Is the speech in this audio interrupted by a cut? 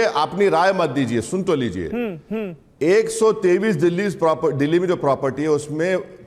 no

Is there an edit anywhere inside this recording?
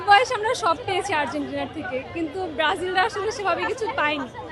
no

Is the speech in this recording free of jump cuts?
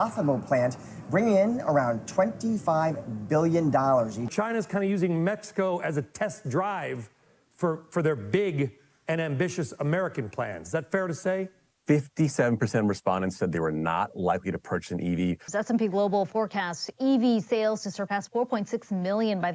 no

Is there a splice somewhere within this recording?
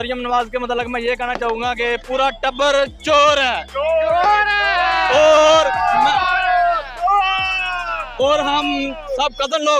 no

